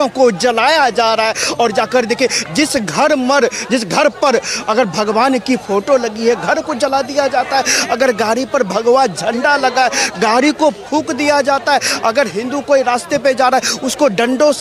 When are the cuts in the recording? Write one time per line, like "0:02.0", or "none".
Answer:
none